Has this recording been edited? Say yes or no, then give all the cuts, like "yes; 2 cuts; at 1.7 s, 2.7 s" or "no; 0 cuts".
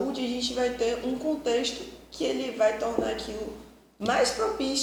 no; 0 cuts